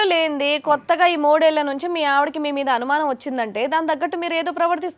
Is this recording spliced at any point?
no; 0 cuts

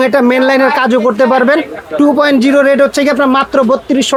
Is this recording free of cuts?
yes; 0 cuts

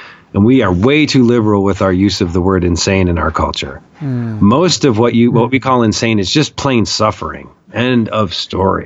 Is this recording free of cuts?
yes; 0 cuts

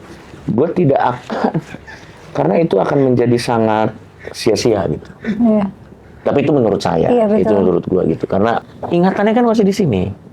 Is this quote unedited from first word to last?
no; 1 cut; at 8.7 s

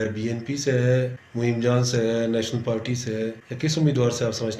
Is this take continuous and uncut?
no; 2 cuts; at 1.2 s, 3.4 s

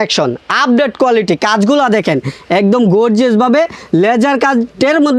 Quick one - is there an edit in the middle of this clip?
no; 0 cuts

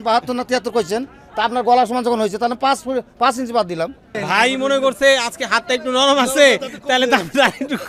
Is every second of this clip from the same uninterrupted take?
no; 1 cut; at 4.1 s

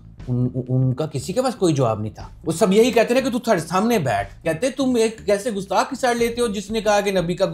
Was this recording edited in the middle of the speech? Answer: yes; 1 cut; at 4.3 s

